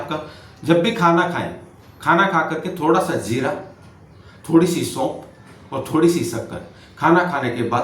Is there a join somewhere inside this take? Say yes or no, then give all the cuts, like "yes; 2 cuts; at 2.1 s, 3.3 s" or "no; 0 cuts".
no; 0 cuts